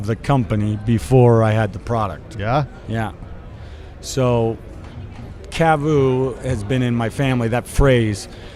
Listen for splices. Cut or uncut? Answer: uncut